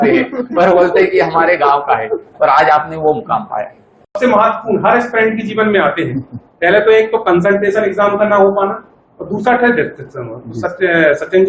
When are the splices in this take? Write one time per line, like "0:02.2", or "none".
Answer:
0:04.1